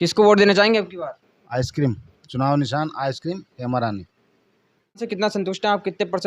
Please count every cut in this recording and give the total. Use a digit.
1